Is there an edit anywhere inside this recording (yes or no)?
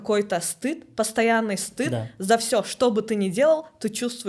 no